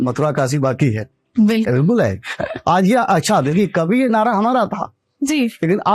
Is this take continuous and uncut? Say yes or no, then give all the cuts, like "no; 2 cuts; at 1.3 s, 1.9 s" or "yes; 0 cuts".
yes; 0 cuts